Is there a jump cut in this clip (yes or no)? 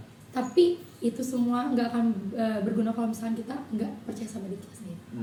no